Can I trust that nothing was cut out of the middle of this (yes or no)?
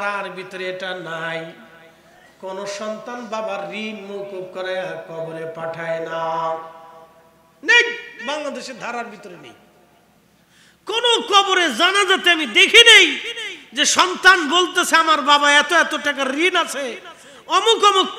yes